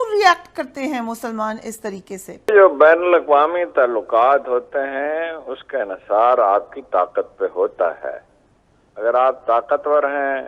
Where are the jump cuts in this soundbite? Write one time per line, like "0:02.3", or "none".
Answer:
0:02.5